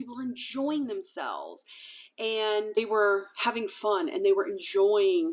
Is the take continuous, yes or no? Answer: no